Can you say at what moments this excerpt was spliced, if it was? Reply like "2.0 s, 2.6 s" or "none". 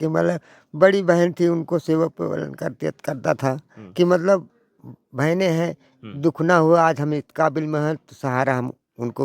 none